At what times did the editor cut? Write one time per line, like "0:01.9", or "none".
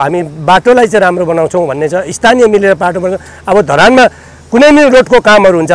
none